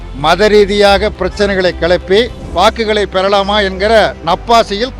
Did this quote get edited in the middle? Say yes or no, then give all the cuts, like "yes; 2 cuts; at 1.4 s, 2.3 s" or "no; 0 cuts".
yes; 1 cut; at 2.4 s